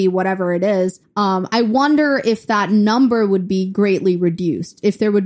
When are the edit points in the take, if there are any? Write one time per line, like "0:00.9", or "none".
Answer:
0:01.0